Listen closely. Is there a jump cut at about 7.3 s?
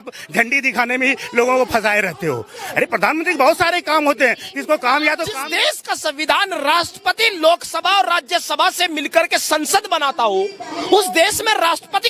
no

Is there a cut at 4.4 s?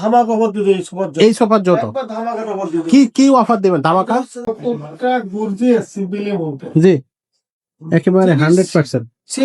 yes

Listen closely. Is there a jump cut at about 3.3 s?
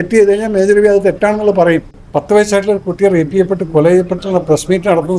no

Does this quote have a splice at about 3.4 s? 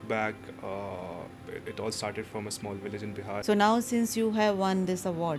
yes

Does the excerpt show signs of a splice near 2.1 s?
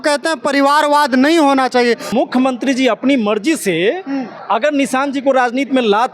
yes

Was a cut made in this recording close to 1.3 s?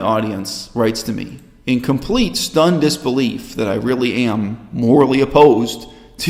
no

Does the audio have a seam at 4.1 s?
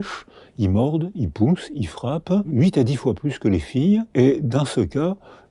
yes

